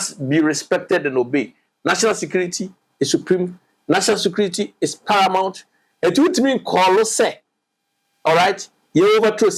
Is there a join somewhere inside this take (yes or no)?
no